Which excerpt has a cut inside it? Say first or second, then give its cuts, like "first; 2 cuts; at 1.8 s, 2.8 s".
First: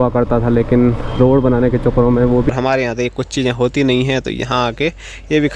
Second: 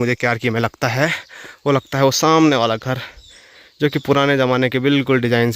first; 1 cut; at 2.5 s